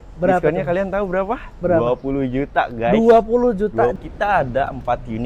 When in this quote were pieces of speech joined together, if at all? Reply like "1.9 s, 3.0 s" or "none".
4.0 s